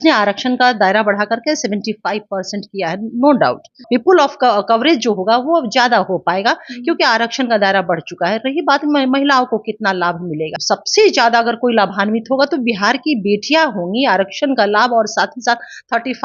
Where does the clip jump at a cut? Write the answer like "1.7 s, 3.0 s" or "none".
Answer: 3.8 s, 10.6 s